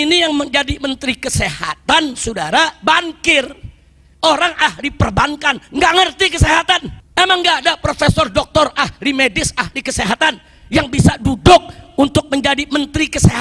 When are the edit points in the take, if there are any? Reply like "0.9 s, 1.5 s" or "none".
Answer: 7.0 s